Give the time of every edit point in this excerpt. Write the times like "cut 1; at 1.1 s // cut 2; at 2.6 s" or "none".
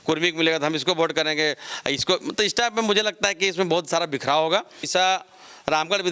cut 1; at 4.9 s